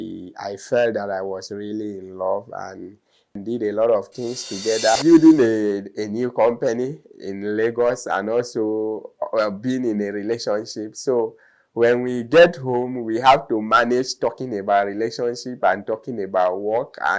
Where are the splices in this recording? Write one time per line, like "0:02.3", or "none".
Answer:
0:03.3
0:05.0